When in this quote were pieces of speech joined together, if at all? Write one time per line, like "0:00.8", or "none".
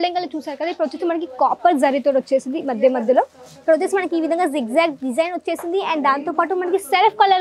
none